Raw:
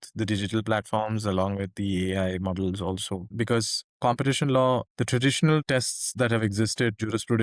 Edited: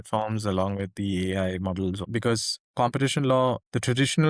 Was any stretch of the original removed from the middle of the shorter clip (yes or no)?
yes